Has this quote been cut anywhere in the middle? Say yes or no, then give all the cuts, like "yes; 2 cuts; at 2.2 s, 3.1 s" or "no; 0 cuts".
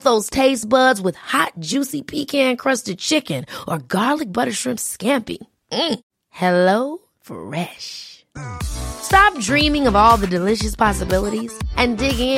no; 0 cuts